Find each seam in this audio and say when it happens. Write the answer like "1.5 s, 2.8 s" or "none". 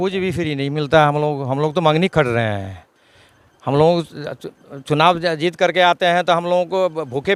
none